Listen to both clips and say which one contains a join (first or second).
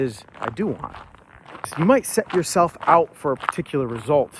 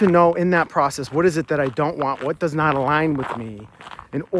first